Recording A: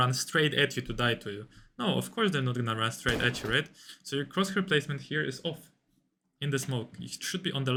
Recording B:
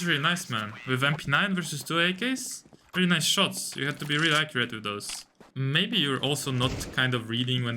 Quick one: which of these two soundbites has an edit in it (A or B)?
B